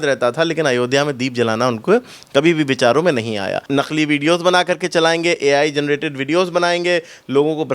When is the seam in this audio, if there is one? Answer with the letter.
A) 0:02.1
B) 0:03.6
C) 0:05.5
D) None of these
B